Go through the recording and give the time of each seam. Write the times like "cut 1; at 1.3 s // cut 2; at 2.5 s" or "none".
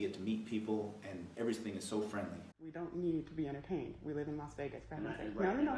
cut 1; at 1.2 s // cut 2; at 2.6 s